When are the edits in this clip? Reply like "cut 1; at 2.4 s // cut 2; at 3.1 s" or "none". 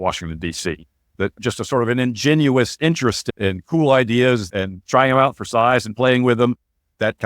cut 1; at 4.5 s